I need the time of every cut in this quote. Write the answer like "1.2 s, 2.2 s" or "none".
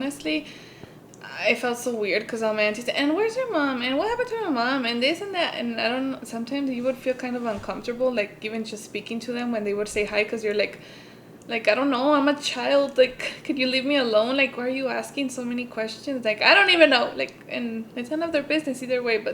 none